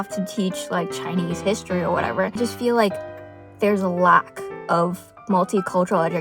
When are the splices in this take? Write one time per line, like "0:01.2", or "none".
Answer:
0:02.4